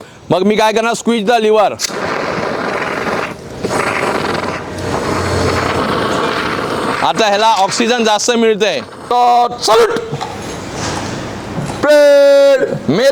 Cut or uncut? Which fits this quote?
cut